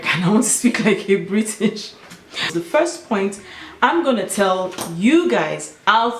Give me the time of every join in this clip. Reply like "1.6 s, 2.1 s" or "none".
2.5 s